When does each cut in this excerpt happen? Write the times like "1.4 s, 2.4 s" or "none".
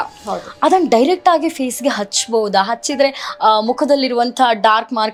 none